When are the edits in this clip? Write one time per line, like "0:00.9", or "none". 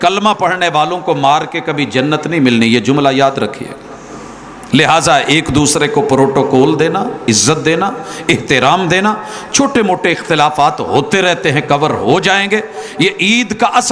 none